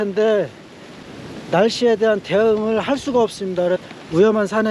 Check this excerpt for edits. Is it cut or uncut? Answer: cut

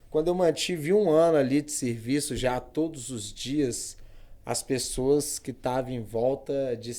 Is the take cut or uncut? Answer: uncut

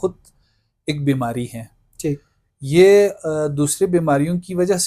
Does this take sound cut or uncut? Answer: uncut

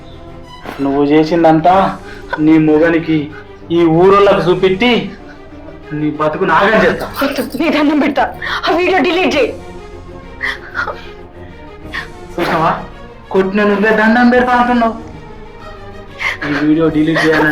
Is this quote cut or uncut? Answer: uncut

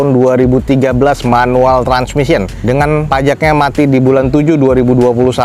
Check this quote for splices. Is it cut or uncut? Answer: uncut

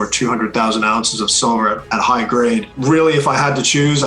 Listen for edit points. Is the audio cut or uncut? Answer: cut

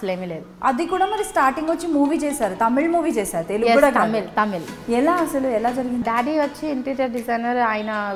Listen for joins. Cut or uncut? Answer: cut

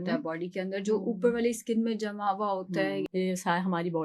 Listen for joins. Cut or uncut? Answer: cut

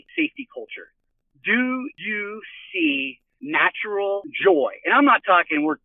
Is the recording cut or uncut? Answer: cut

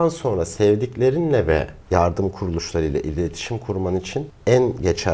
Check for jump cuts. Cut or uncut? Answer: uncut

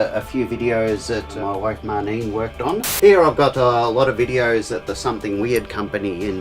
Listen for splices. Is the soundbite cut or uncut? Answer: cut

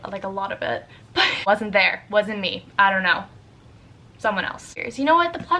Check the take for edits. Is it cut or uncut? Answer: cut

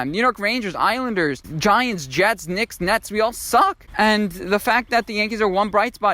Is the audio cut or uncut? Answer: cut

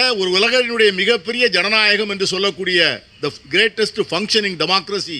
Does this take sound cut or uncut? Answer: uncut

